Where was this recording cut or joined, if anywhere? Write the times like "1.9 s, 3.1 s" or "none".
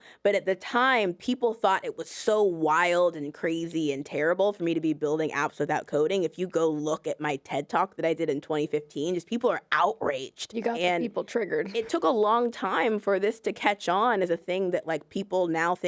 10.5 s, 12.0 s